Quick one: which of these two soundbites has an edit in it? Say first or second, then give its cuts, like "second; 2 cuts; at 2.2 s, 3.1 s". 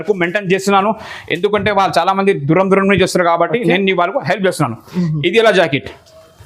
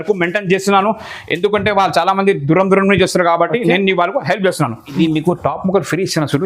second; 1 cut; at 4.8 s